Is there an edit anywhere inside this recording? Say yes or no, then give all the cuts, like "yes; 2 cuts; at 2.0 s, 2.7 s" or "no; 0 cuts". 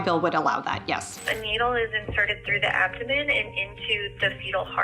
yes; 1 cut; at 1.1 s